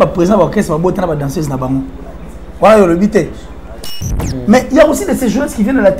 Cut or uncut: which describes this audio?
cut